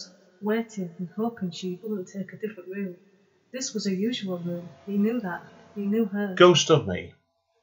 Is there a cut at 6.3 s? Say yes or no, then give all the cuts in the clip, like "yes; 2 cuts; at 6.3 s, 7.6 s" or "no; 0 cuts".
yes; 1 cut; at 6.3 s